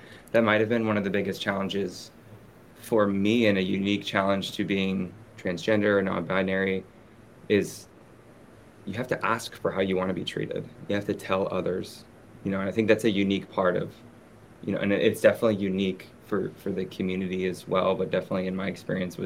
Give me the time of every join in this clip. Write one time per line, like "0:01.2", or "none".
0:05.2